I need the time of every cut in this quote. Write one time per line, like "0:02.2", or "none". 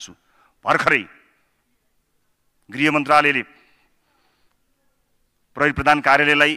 none